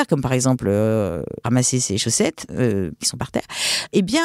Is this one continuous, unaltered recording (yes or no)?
no